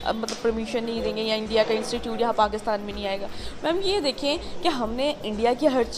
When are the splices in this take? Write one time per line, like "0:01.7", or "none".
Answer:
none